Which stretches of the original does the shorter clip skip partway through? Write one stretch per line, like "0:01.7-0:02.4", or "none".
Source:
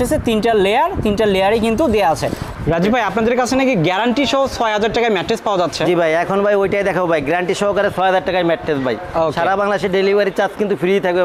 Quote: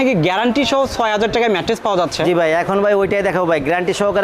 none